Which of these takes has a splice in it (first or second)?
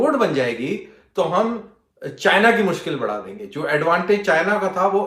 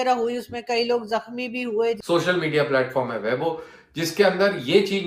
second